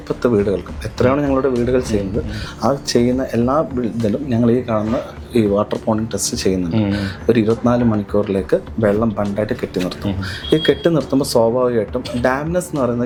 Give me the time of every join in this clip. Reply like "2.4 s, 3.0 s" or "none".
none